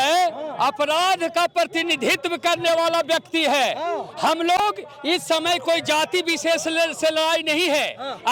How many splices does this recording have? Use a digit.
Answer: 0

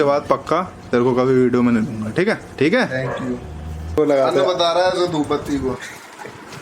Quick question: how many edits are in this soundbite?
2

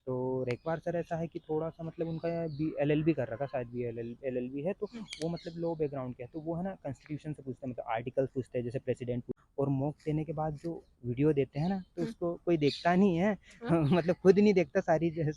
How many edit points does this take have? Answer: 1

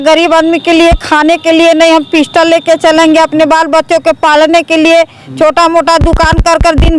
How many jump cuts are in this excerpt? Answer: 0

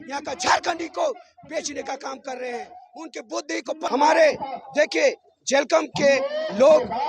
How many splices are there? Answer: 1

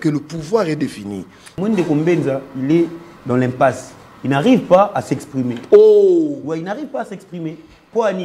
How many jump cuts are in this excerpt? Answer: 1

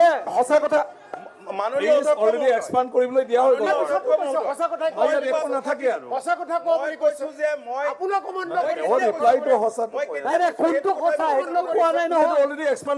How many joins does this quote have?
0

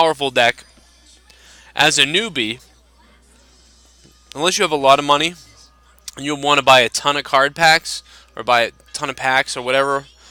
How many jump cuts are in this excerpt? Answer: 1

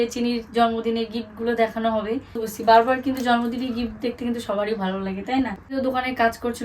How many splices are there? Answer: 2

